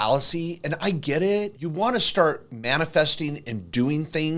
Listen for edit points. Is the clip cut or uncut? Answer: cut